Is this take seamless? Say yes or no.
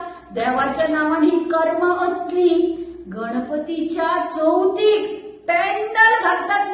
yes